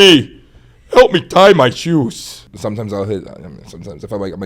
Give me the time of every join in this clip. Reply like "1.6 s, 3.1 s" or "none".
2.5 s